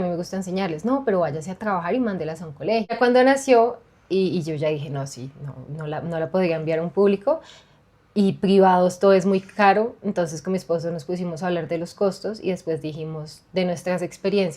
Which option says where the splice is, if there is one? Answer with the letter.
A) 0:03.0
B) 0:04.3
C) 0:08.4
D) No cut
A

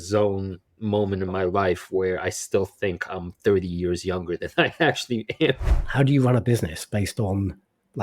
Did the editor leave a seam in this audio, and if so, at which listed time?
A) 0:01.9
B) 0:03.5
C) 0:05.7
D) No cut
C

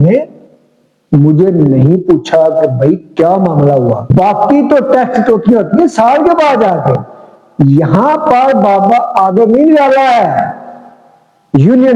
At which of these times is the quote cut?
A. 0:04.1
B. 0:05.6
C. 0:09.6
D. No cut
A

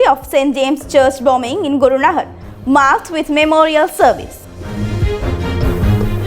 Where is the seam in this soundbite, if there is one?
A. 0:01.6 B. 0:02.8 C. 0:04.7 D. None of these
C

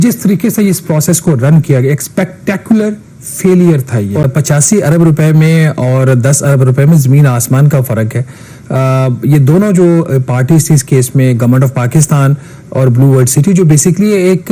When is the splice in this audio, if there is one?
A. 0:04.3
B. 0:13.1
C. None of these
A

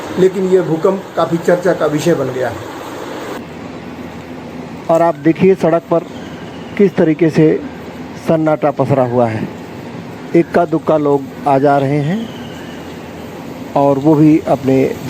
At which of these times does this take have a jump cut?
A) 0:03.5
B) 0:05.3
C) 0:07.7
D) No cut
A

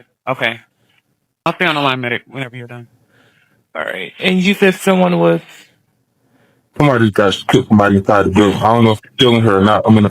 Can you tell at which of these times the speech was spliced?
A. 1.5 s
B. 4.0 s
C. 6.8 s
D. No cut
A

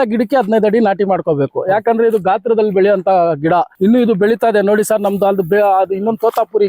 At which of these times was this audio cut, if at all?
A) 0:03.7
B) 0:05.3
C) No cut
A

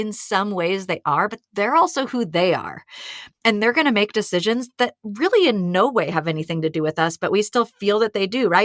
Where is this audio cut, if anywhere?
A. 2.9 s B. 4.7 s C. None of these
C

